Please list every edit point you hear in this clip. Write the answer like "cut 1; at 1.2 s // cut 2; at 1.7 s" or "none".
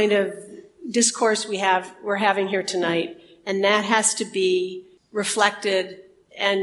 none